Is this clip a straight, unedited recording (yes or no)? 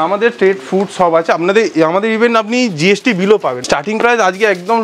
no